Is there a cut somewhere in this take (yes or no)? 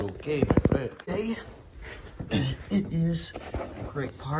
yes